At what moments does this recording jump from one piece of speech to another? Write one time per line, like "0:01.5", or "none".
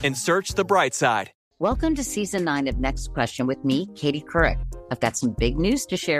0:01.3